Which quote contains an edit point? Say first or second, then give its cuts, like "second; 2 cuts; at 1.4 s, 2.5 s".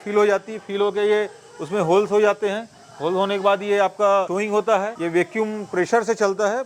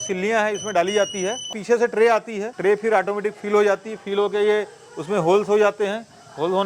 second; 1 cut; at 1.5 s